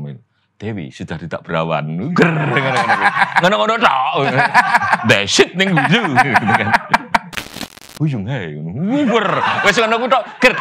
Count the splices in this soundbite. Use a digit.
1